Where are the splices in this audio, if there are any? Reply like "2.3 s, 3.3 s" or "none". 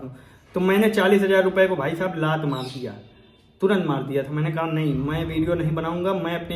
none